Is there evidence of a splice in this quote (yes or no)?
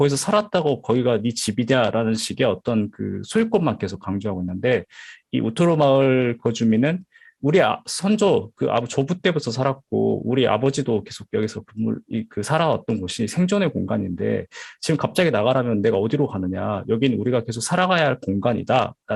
no